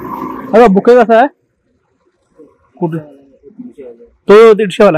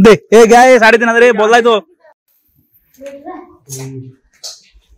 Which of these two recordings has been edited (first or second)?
second